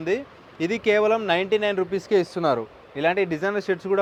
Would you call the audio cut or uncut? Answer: uncut